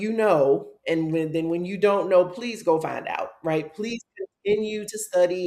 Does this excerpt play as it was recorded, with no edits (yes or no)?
yes